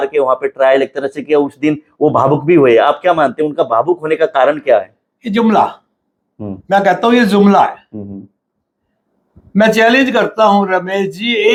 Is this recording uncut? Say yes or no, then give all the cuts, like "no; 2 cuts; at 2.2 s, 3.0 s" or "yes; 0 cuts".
yes; 0 cuts